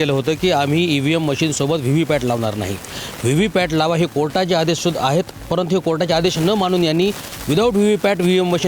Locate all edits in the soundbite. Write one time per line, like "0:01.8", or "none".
none